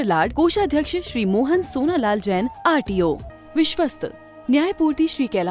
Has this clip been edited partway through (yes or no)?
yes